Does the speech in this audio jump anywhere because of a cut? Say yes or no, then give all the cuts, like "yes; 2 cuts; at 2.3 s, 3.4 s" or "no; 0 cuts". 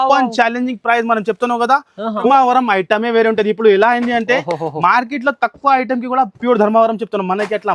yes; 1 cut; at 2.3 s